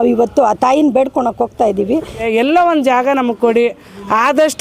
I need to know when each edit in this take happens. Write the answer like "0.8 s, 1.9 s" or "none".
2.2 s